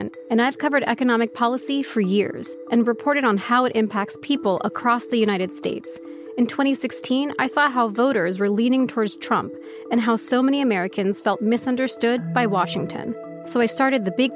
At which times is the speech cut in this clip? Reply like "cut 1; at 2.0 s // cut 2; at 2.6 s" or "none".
none